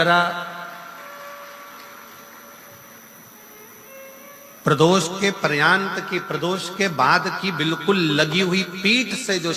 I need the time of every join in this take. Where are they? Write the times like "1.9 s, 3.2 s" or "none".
none